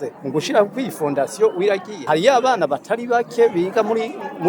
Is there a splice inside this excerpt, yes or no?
yes